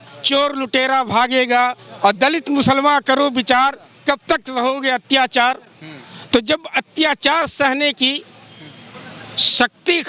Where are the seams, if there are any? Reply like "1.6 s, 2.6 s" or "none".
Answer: none